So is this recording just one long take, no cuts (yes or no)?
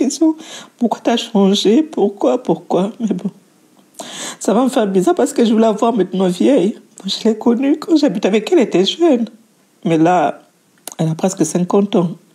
yes